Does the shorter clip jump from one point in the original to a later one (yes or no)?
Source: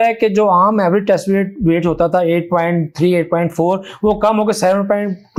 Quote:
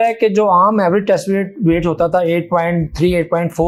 no